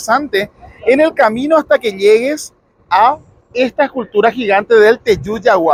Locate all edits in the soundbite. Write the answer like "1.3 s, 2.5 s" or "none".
none